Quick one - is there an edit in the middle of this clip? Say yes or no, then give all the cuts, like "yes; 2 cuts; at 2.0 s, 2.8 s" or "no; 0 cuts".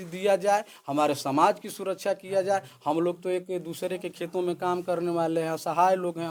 no; 0 cuts